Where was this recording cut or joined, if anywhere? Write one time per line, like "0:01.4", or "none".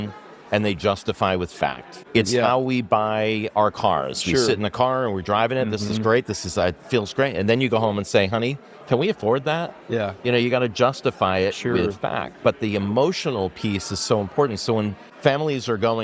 0:01.9
0:15.0